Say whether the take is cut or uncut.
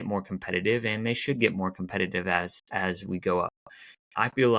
uncut